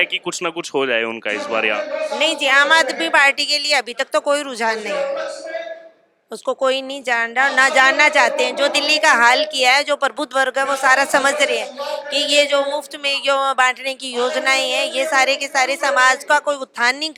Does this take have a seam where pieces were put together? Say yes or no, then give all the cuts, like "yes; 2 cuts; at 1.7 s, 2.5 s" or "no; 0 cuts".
no; 0 cuts